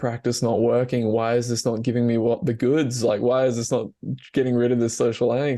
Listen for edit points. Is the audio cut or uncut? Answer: uncut